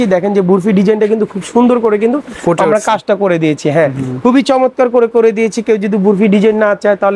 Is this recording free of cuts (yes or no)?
yes